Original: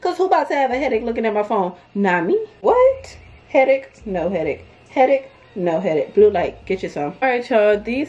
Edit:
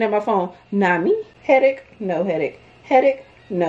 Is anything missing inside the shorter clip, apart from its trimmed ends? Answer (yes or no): yes